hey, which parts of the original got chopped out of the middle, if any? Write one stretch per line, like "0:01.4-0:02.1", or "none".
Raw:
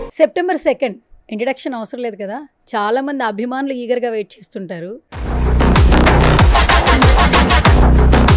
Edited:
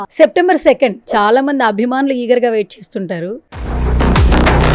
0:01.0-0:02.6

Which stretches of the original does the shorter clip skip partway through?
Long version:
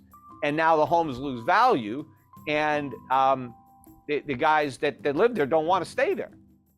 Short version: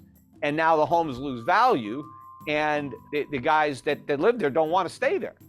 0:03.0-0:03.9

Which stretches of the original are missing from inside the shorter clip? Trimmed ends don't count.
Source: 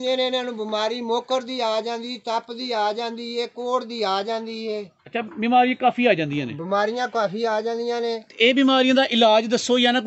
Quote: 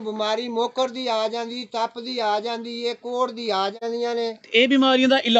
0:04.3-0:07.7

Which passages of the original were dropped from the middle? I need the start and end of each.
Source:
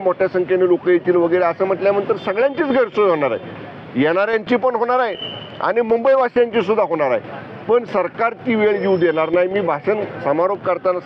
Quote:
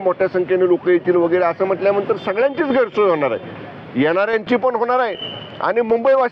none

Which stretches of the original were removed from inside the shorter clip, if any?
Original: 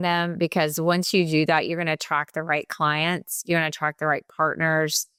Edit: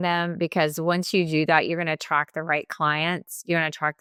none

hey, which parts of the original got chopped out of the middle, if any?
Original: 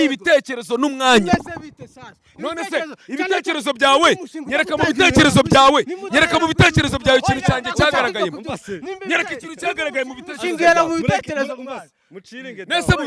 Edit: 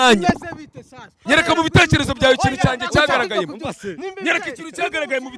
0:02.2-0:06.0

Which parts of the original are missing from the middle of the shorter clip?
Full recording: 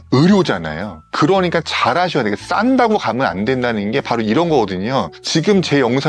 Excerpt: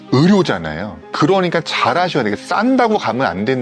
none

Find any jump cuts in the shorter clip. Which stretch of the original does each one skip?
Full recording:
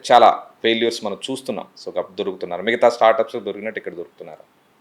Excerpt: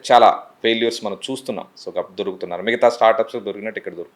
none

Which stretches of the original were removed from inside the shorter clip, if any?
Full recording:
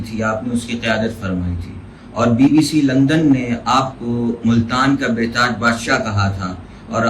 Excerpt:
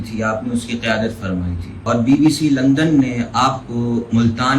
0:01.7-0:02.0

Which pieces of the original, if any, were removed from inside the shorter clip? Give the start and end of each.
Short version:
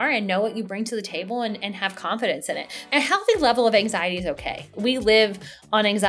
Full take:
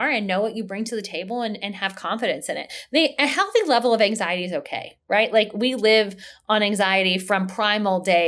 0:02.9-0:03.1
0:05.0-0:05.5

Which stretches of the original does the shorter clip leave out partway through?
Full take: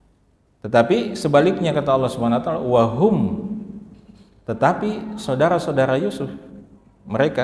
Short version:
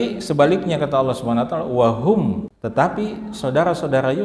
0:03.4-0:04.3

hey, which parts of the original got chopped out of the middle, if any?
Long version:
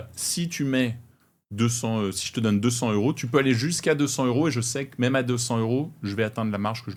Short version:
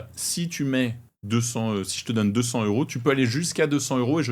0:01.1-0:01.4

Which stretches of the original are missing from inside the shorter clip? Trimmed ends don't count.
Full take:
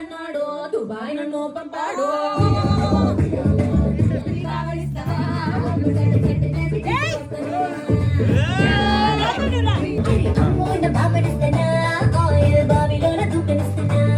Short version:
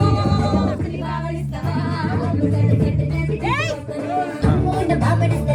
0:03.3-0:04.3
0:07.8-0:10.3

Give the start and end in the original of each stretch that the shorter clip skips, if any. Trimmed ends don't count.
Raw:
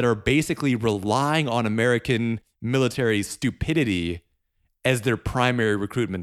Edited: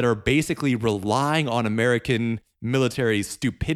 none

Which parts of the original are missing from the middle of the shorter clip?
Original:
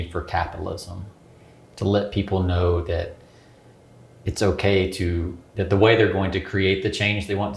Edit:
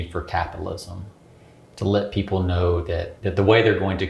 0:03.1-0:05.5

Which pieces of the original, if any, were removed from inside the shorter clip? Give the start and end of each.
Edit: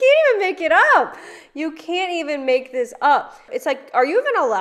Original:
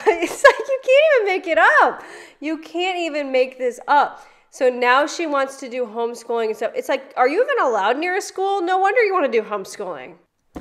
0:04.3-0:06.7

